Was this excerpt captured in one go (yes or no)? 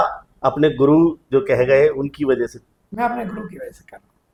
yes